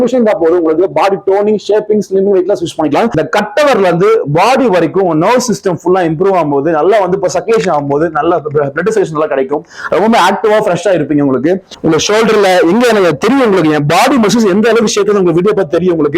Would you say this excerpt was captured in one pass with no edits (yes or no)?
no